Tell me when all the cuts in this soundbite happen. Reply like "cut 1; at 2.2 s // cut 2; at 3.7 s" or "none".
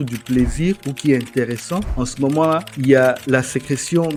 none